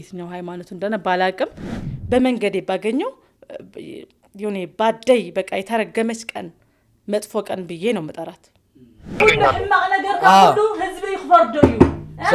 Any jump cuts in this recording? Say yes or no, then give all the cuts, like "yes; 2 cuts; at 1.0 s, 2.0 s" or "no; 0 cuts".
yes; 2 cuts; at 1.8 s, 9.2 s